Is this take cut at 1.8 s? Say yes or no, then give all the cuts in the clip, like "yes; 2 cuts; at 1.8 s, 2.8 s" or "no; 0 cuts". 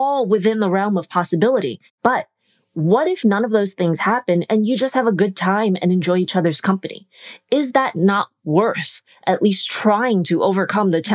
yes; 1 cut; at 1.8 s